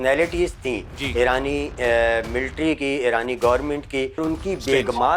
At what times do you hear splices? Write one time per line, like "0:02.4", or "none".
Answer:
0:04.2